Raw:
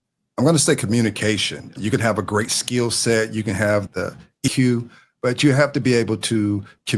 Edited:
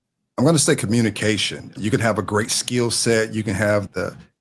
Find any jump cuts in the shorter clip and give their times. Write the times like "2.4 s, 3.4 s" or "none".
none